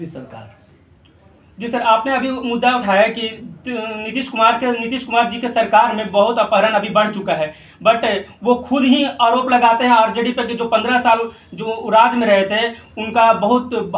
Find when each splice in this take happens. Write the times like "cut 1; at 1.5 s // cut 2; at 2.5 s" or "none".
none